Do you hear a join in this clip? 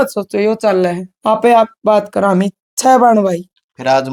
no; 0 cuts

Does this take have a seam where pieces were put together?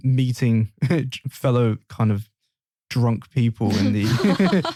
no; 0 cuts

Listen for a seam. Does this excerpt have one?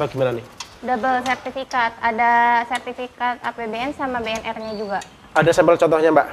no; 0 cuts

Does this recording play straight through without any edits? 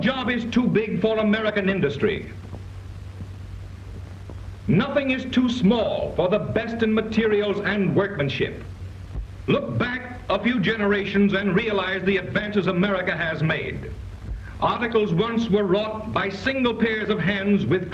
no; 1 cut; at 16.0 s

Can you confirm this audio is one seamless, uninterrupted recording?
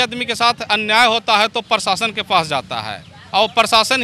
yes; 0 cuts

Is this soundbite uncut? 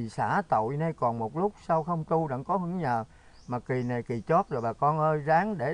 yes; 0 cuts

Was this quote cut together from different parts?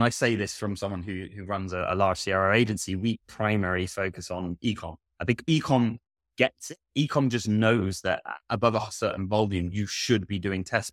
no; 0 cuts

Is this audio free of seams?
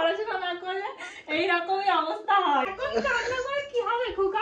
no; 1 cut; at 2.7 s

